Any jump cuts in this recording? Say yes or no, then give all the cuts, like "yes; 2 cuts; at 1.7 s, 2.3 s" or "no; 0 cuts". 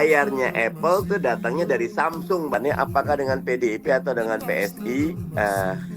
yes; 1 cut; at 2.5 s